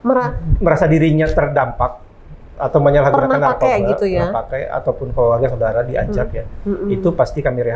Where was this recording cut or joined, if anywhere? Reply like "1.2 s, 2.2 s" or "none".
none